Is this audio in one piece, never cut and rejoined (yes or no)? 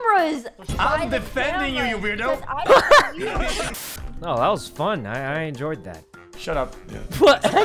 no